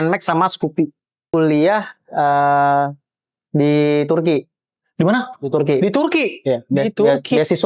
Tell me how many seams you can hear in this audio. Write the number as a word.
one